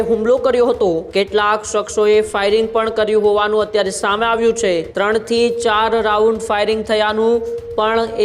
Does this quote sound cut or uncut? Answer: cut